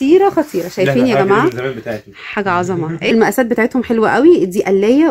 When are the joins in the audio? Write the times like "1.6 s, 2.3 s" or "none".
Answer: 3.1 s